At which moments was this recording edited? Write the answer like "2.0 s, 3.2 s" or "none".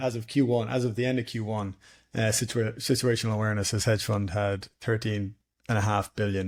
none